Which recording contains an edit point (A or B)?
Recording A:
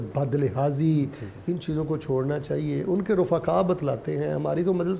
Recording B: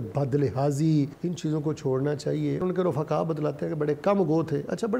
B